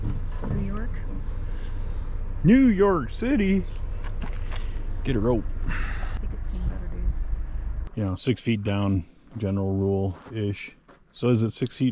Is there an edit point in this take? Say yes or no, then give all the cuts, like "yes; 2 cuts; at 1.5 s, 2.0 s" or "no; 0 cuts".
yes; 2 cuts; at 6.2 s, 7.8 s